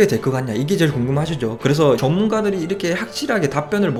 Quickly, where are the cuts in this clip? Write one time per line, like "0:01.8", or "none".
none